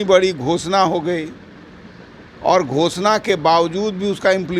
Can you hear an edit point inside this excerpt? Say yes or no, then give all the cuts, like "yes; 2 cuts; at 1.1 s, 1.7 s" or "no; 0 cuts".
no; 0 cuts